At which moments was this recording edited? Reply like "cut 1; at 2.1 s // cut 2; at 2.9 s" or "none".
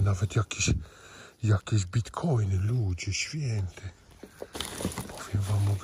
none